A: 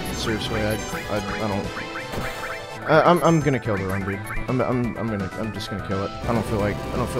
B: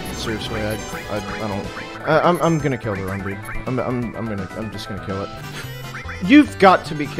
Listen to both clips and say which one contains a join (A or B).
B